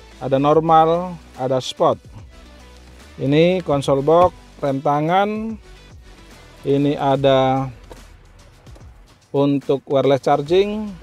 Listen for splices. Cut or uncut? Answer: uncut